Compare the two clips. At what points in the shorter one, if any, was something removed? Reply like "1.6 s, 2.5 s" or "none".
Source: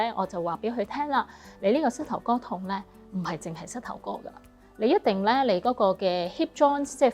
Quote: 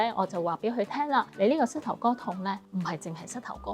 1.3 s, 2.6 s